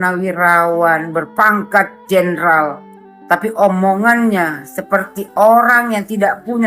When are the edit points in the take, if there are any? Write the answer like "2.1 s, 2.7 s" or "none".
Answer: none